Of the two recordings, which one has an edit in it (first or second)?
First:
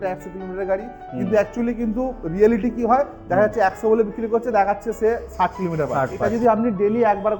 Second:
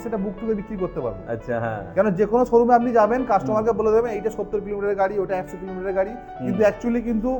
first